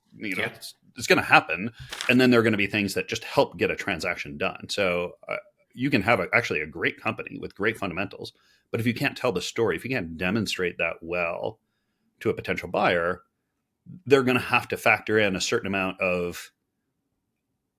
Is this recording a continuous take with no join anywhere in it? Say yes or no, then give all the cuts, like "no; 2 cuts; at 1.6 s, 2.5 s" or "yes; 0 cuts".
no; 1 cut; at 1.9 s